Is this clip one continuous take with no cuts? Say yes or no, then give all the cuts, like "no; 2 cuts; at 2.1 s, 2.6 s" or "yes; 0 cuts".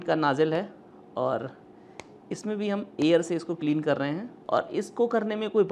no; 1 cut; at 4.3 s